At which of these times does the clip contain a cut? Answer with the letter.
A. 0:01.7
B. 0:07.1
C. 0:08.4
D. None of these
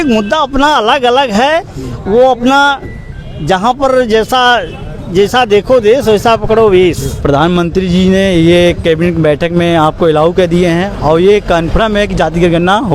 B